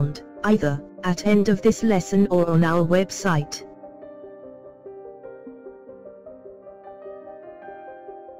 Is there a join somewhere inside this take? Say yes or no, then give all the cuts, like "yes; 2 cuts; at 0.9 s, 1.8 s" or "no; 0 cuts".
yes; 1 cut; at 3.4 s